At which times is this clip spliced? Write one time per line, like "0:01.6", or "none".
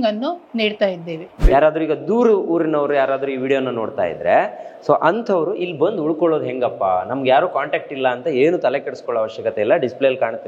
0:01.4